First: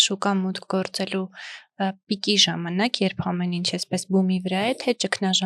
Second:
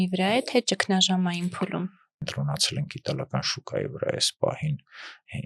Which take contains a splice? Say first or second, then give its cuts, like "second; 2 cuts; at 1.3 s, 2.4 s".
second; 1 cut; at 2.1 s